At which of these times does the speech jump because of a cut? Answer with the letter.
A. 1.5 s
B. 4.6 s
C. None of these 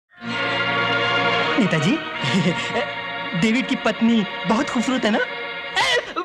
A